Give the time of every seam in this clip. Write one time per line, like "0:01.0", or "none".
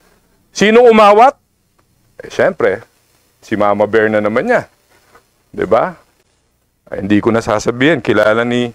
none